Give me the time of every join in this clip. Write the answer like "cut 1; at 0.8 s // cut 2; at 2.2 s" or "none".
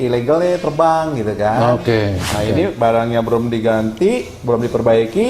cut 1; at 2.3 s